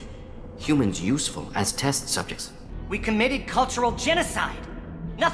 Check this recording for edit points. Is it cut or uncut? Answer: cut